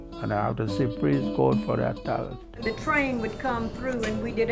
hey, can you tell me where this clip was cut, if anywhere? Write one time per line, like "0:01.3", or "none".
0:02.4